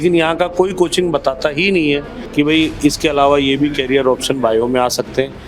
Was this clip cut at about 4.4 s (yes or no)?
no